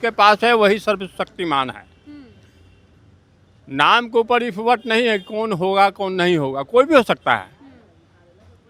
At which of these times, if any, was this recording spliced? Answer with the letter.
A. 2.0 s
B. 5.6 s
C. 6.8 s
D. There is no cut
D